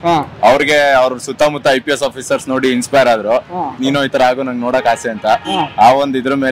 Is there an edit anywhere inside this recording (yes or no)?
yes